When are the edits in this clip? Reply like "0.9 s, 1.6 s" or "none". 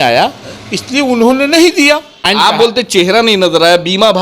2.3 s